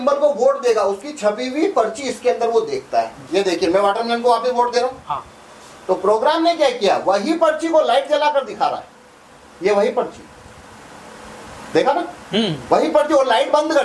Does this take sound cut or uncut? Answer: cut